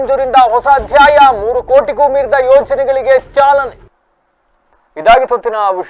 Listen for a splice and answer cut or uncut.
uncut